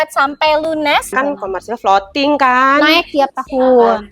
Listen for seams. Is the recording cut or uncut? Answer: cut